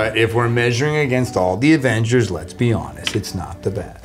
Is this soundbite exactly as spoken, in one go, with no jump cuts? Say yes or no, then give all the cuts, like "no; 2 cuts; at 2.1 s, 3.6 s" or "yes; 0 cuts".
yes; 0 cuts